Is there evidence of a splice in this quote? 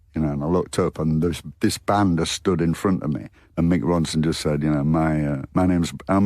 yes; 1 cut; at 3.3 s

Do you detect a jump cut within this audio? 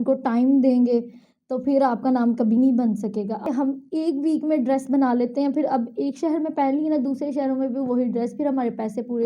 yes; 1 cut; at 3.4 s

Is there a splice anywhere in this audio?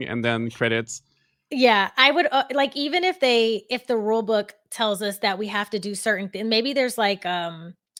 no; 0 cuts

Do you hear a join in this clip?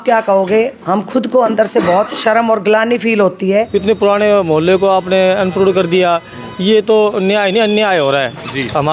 yes; 1 cut; at 3.7 s

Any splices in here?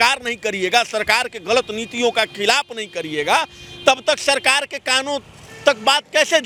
no; 0 cuts

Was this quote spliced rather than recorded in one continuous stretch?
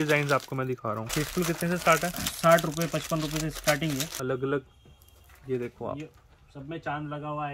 yes; 2 cuts; at 1.1 s, 4.1 s

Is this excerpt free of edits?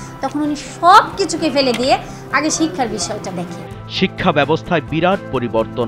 yes; 0 cuts

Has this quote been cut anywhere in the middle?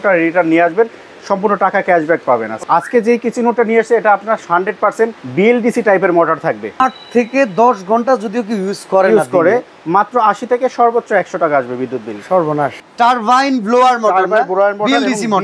yes; 4 cuts; at 2.6 s, 5.2 s, 6.8 s, 12.8 s

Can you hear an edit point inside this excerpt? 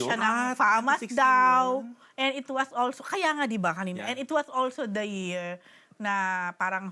no; 0 cuts

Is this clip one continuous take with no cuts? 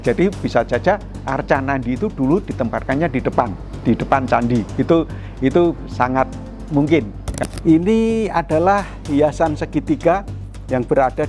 no; 1 cut; at 7.3 s

